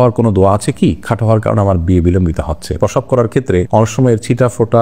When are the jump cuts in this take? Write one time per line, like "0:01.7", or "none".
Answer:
0:02.7